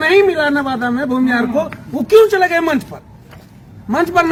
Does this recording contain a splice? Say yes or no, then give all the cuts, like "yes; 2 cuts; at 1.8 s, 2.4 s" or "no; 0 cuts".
no; 0 cuts